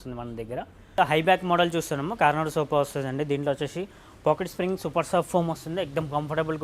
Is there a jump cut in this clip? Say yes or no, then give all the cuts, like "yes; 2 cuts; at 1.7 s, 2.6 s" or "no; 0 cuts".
yes; 1 cut; at 1.0 s